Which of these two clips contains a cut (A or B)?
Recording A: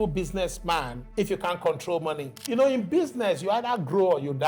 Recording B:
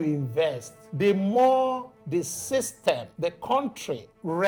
A